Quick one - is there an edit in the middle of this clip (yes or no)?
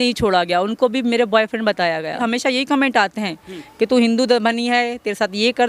yes